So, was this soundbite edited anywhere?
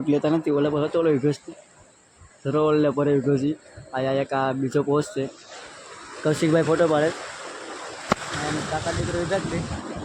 no; 0 cuts

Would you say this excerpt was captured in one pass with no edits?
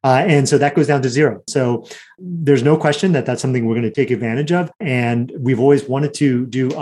no; 3 cuts; at 1.5 s, 3.9 s, 4.8 s

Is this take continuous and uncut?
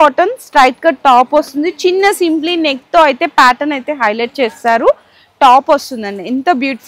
yes; 0 cuts

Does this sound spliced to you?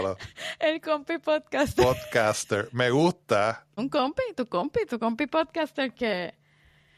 yes; 1 cut; at 3.7 s

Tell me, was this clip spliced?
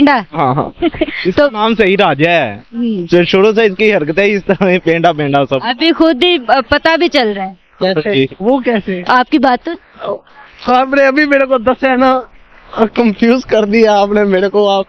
no; 0 cuts

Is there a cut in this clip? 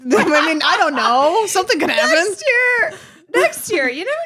no; 0 cuts

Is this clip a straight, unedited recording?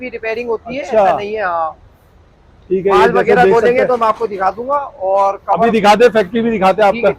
yes; 0 cuts

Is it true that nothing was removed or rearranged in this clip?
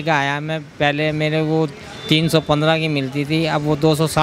yes; 0 cuts

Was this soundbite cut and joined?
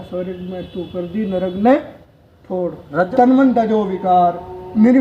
yes; 1 cut; at 3.1 s

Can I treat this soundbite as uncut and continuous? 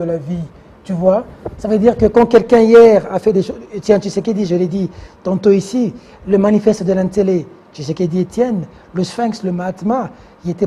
yes; 0 cuts

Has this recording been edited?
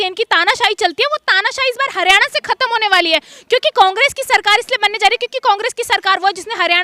no; 0 cuts

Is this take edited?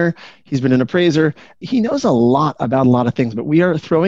yes; 1 cut; at 1.5 s

